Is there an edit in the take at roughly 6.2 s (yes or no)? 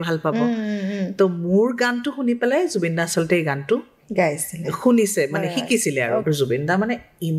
yes